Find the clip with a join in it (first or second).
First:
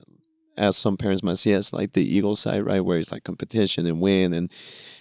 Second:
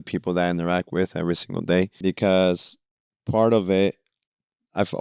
second